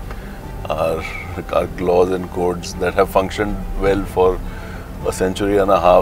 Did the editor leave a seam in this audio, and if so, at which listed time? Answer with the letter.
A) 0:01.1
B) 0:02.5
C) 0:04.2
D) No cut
D